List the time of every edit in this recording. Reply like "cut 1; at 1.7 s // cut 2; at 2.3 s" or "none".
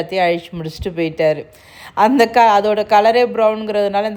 none